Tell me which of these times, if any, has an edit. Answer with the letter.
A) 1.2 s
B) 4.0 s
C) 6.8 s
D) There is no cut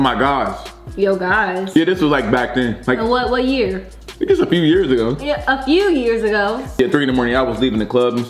C